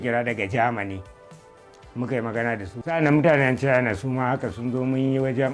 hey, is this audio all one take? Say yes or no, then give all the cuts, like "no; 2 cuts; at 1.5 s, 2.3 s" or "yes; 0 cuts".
no; 1 cut; at 2.9 s